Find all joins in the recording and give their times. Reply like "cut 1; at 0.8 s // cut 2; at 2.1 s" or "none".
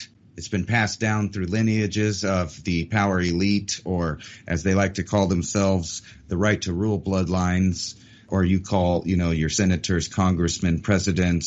cut 1; at 8.3 s